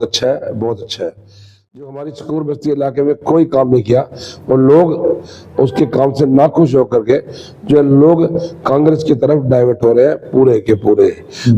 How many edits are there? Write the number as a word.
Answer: one